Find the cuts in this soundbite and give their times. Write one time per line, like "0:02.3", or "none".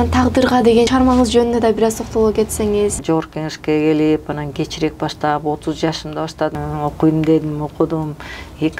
0:00.9
0:03.0
0:06.6